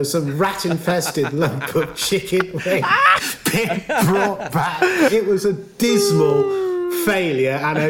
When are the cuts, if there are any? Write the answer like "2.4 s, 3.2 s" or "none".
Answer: 5.1 s